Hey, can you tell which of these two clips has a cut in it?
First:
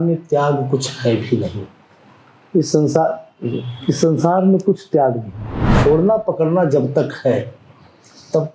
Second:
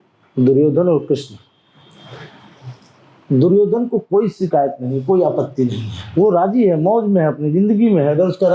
first; 1 cut; at 5.7 s

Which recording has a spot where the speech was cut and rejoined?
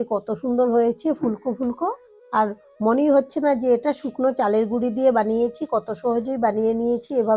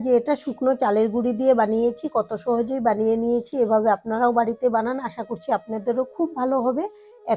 first; 1 cut; at 2.1 s

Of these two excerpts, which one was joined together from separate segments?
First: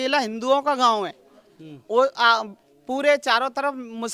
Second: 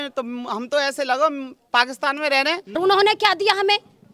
second; 1 cut; at 2.6 s

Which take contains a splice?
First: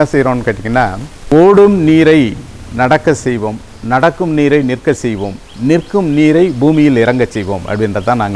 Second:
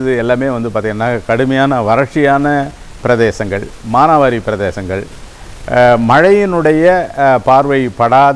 first; 1 cut; at 1.1 s

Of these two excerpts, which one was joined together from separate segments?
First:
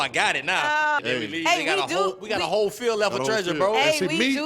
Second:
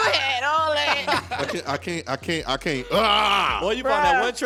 first; 1 cut; at 1.0 s

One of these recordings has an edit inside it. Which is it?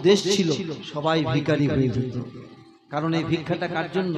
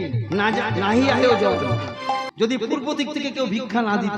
second; 1 cut; at 2.3 s

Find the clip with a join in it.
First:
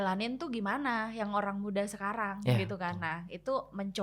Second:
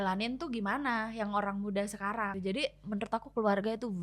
second; 1 cut; at 2.3 s

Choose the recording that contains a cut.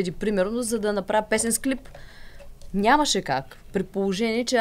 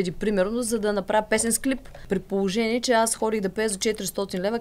second; 1 cut; at 1.9 s

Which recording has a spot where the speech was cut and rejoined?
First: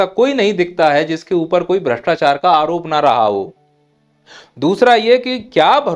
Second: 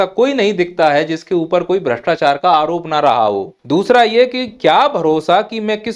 second; 1 cut; at 3.5 s

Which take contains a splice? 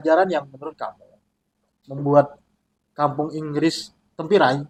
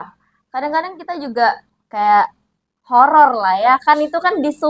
second; 1 cut; at 1.8 s

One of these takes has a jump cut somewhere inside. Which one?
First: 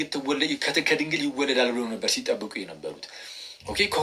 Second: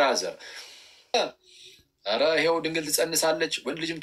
second; 1 cut; at 1.1 s

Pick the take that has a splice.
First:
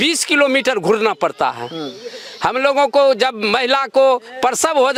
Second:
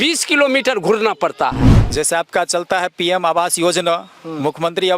second; 1 cut; at 1.7 s

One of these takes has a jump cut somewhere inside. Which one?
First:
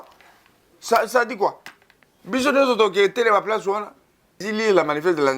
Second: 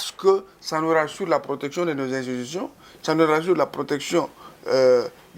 first; 1 cut; at 4.5 s

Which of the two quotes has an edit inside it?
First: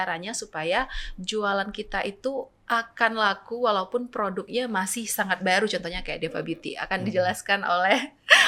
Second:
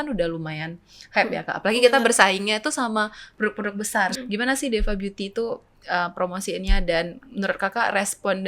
second; 1 cut; at 4.1 s

